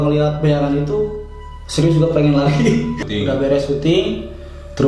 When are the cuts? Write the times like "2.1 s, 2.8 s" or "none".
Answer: 3.0 s